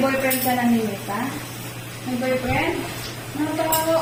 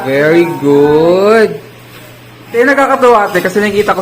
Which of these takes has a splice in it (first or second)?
second